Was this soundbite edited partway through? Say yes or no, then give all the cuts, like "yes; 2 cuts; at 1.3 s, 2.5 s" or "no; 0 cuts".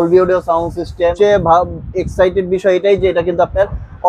yes; 1 cut; at 1.1 s